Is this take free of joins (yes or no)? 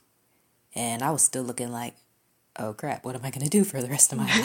yes